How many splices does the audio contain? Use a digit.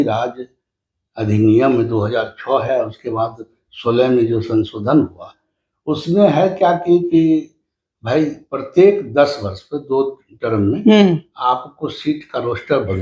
0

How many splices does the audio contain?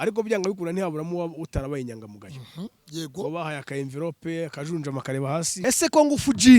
1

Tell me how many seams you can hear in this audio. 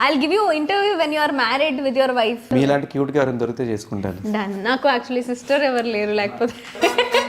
1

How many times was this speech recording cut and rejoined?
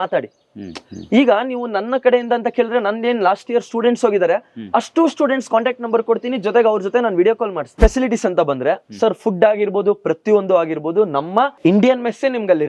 2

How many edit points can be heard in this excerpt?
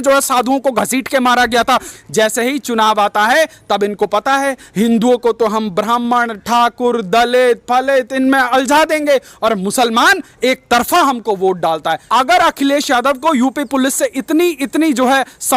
2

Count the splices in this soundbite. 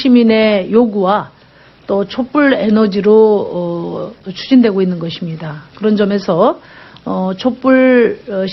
1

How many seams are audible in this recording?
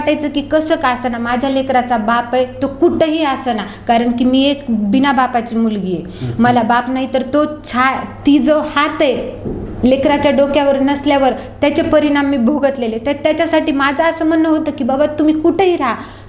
0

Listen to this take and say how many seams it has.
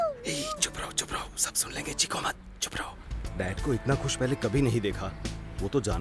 1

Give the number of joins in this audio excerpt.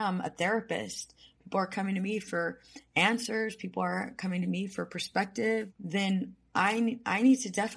1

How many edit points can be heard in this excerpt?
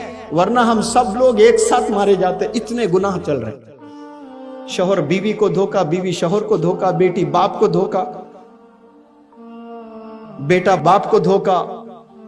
0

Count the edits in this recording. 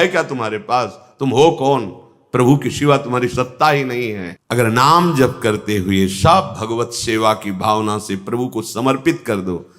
1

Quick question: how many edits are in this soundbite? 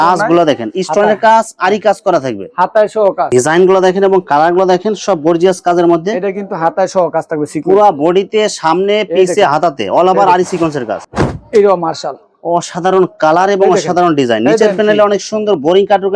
2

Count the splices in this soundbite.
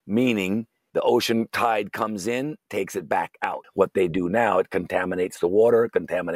1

